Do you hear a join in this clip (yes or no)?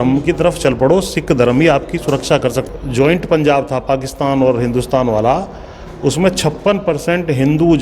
yes